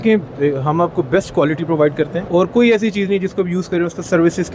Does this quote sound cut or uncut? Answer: uncut